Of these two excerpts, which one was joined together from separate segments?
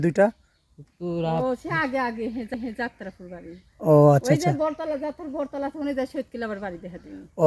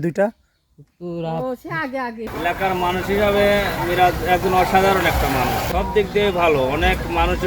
second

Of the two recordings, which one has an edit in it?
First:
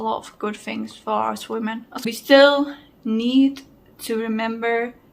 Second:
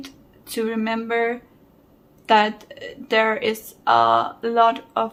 first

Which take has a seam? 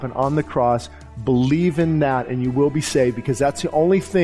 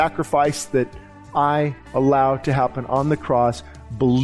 second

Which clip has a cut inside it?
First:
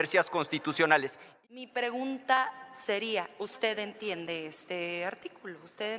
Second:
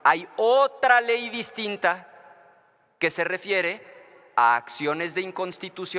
first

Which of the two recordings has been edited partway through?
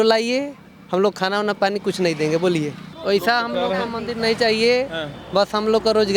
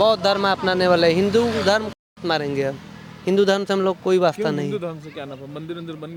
first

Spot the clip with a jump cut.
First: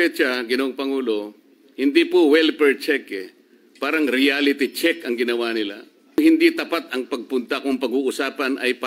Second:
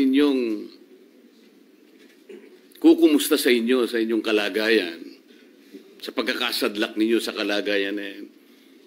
first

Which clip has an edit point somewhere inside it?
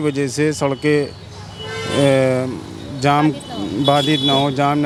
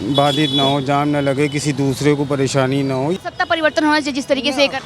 second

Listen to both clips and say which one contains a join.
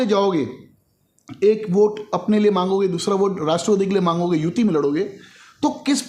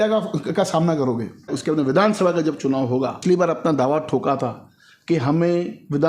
second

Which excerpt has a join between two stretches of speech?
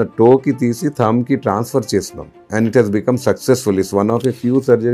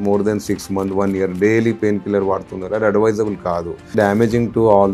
second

